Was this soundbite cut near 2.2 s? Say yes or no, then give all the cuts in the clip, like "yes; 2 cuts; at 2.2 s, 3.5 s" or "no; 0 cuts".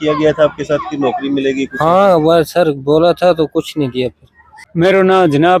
no; 1 cut; at 4.6 s